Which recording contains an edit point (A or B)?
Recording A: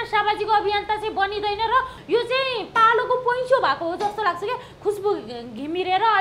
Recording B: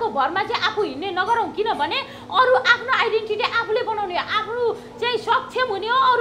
A